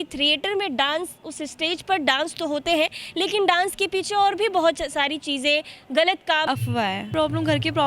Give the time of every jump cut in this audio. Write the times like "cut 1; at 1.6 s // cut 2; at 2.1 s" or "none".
cut 1; at 6.5 s